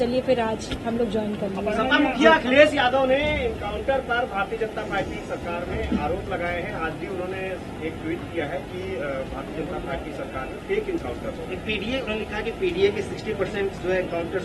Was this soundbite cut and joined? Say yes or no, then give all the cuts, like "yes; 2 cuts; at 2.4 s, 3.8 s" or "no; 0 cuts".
no; 0 cuts